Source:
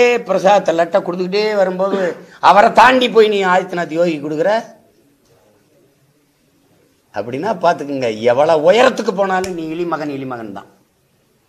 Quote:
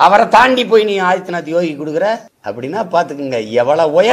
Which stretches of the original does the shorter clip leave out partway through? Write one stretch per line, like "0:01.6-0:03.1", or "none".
0:04.8-0:07.1